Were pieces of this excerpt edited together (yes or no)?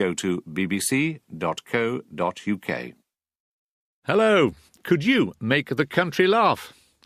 no